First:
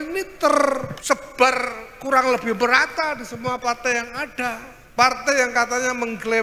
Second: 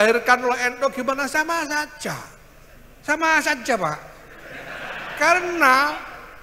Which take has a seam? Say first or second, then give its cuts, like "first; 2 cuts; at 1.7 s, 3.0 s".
first; 2 cuts; at 0.9 s, 4.7 s